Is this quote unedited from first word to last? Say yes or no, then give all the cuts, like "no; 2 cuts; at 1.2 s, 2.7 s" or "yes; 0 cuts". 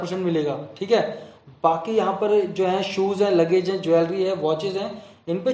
yes; 0 cuts